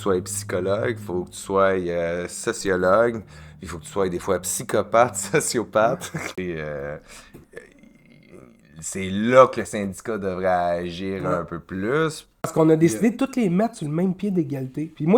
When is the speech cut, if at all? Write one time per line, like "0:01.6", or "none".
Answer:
0:06.3
0:12.4